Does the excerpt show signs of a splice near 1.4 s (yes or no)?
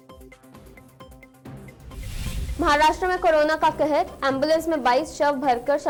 no